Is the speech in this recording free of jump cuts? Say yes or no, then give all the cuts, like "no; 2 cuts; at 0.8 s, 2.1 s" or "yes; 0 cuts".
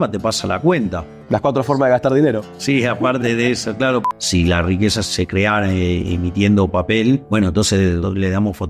no; 3 cuts; at 4.0 s, 5.0 s, 7.7 s